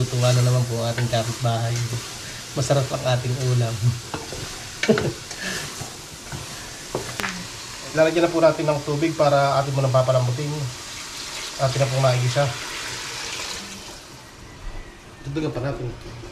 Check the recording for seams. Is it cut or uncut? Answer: uncut